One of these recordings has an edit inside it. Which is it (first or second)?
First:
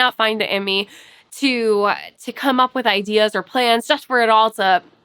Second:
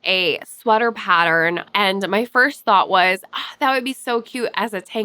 second